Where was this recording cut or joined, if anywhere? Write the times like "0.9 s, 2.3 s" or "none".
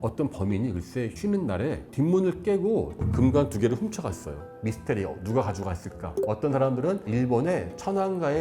3.0 s, 4.4 s